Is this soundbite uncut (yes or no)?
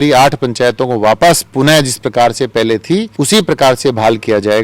no